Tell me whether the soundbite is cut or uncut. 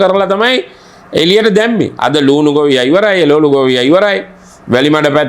cut